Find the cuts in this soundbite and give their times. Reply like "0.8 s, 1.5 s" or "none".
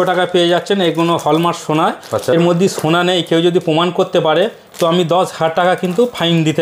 2.3 s